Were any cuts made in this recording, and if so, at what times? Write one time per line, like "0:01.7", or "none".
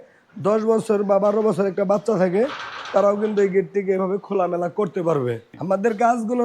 0:05.5